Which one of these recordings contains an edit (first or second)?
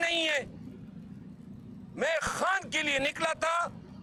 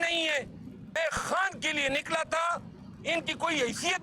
second